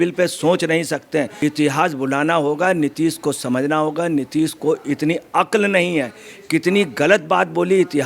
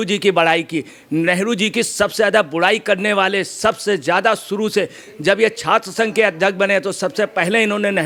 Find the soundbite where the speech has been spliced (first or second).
first